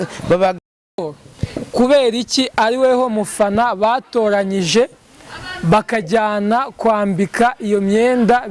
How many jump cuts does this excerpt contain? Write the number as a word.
one